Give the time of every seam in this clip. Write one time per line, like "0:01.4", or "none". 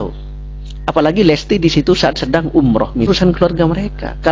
0:03.1

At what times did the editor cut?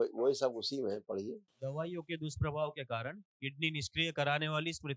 0:01.5

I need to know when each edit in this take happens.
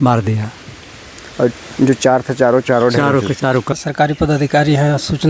0:03.7

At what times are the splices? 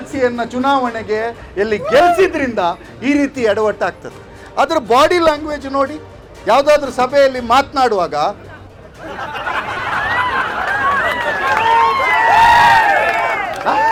none

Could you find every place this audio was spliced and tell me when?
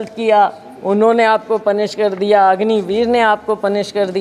none

